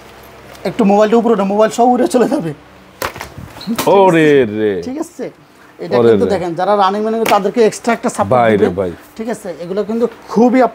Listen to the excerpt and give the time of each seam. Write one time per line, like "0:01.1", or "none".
none